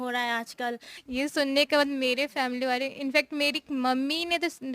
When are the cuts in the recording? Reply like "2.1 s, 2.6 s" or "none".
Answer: 0.9 s